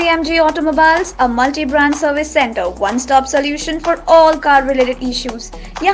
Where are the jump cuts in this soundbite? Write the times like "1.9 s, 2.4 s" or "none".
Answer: none